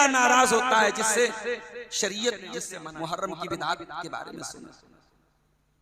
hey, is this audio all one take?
no; 1 cut; at 2.8 s

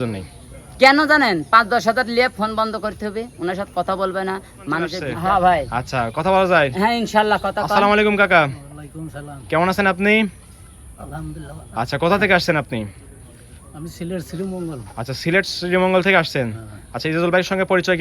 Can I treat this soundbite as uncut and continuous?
no; 1 cut; at 5.0 s

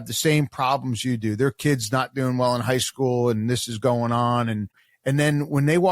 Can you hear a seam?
yes; 1 cut; at 4.9 s

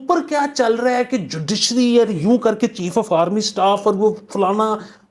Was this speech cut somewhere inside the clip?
no; 0 cuts

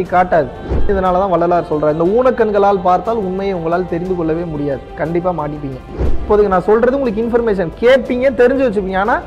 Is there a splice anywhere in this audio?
yes; 2 cuts; at 0.9 s, 6.2 s

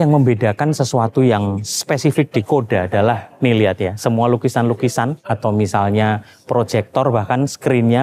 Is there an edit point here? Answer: yes; 1 cut; at 5.2 s

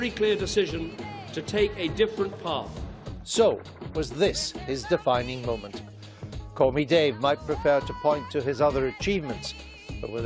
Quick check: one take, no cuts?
no; 1 cut; at 6.9 s

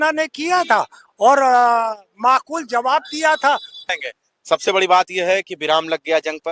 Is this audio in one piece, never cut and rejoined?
yes; 0 cuts

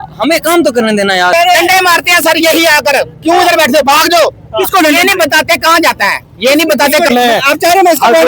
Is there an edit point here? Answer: yes; 3 cuts; at 1.3 s, 4.0 s, 7.1 s

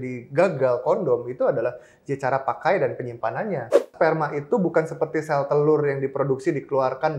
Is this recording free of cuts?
no; 1 cut; at 3.9 s

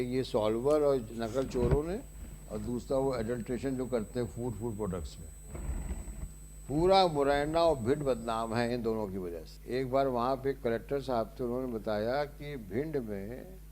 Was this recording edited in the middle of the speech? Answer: yes; 1 cut; at 9.5 s

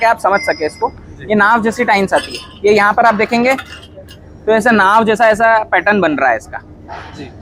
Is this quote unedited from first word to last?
yes; 0 cuts

